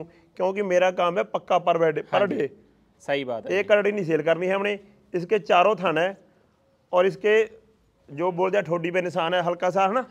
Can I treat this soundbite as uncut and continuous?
yes; 0 cuts

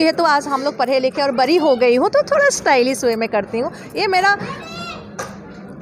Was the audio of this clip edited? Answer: no; 0 cuts

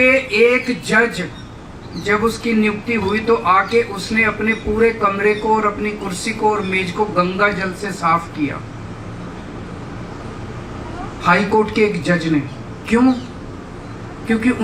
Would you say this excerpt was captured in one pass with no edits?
yes; 0 cuts

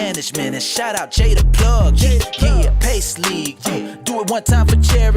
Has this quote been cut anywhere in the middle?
no; 0 cuts

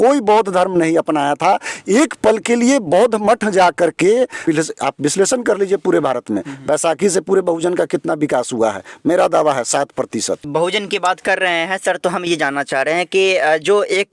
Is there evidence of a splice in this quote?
yes; 2 cuts; at 4.4 s, 10.5 s

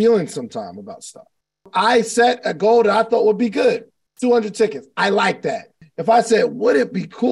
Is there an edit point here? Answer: yes; 2 cuts; at 1.7 s, 5.7 s

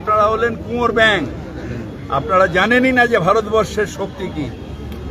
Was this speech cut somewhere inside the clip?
no; 0 cuts

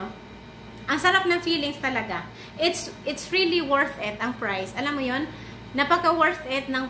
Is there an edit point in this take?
yes; 1 cut; at 2.4 s

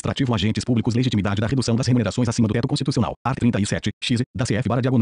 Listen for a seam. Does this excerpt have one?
no; 0 cuts

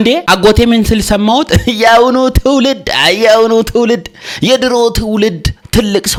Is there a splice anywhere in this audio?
no; 0 cuts

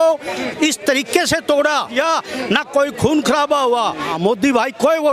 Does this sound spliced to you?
yes; 2 cuts; at 1.9 s, 4.1 s

